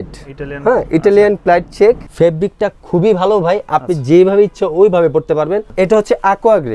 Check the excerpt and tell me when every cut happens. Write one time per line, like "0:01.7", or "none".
0:02.1
0:05.7